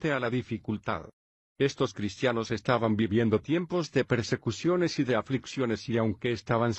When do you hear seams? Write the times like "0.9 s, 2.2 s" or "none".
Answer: none